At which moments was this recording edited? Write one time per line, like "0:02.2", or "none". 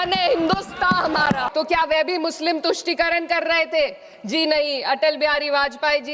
0:01.5